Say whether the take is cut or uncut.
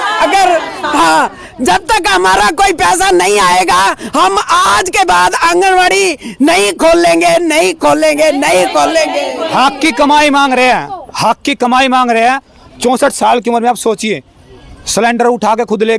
uncut